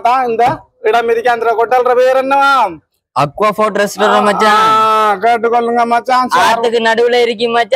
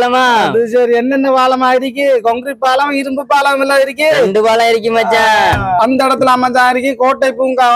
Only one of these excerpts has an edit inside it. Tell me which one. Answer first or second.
second